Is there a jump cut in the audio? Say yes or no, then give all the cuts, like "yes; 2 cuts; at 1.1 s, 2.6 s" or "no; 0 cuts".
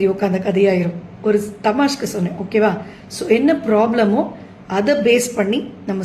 yes; 1 cut; at 3.6 s